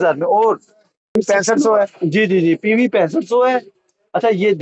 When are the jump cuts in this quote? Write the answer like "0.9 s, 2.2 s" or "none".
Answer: 1.2 s